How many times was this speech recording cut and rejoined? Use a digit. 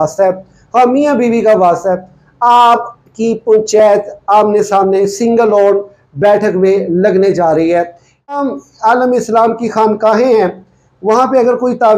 1